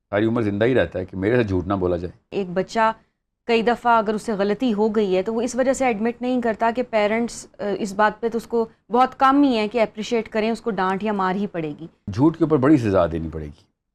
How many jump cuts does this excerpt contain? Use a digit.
2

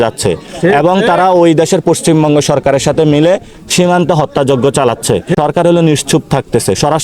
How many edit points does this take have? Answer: 1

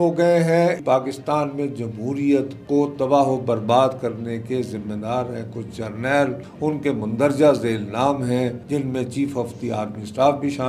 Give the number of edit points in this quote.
4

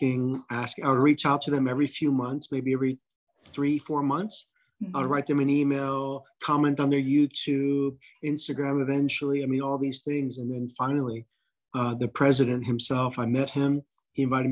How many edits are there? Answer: 0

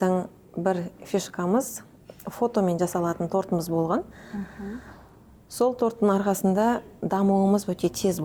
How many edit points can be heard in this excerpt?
0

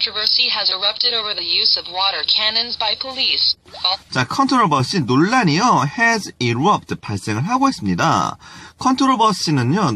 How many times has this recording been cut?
0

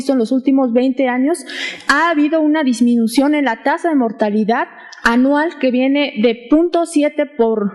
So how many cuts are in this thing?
1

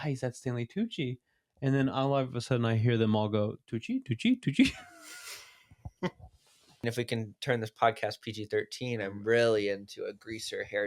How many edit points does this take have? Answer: 2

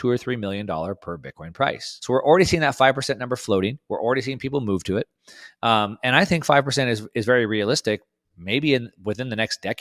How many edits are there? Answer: 1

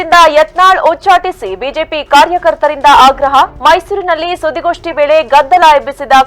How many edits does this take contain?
0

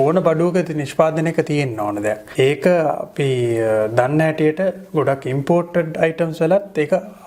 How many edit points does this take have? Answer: 1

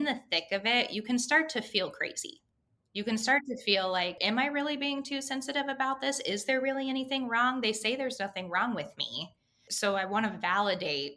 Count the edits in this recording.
2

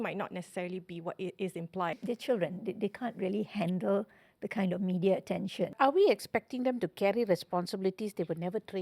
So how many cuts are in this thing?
2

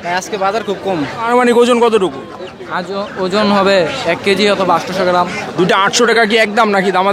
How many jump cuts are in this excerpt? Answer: 2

